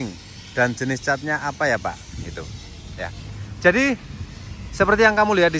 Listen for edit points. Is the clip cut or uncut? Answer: uncut